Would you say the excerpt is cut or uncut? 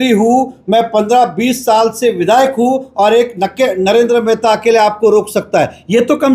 uncut